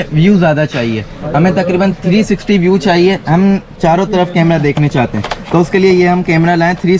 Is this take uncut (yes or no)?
yes